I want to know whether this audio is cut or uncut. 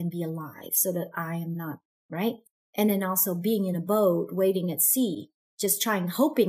cut